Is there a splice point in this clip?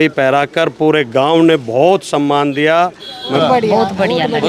yes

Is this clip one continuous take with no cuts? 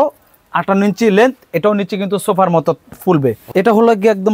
no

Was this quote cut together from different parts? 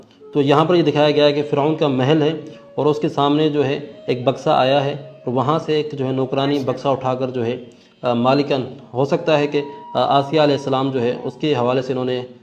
no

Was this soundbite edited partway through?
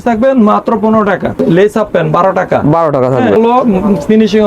yes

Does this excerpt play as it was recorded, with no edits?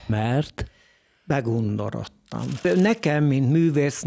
no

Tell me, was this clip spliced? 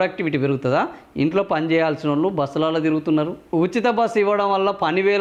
no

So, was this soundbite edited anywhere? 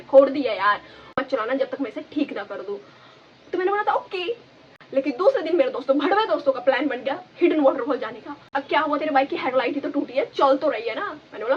yes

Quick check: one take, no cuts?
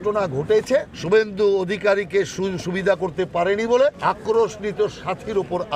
no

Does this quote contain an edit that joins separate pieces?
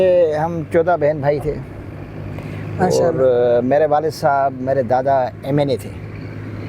no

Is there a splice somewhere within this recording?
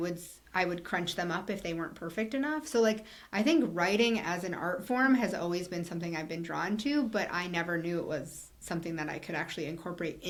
no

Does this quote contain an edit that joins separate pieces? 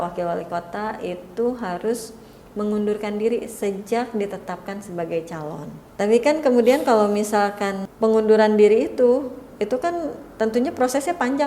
yes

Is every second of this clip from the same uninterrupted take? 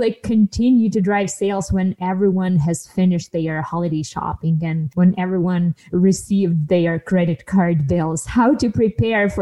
yes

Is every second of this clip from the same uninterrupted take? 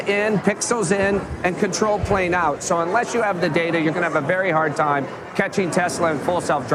yes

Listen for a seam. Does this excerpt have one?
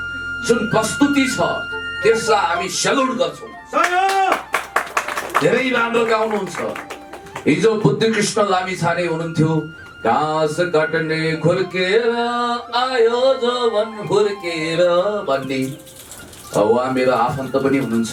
no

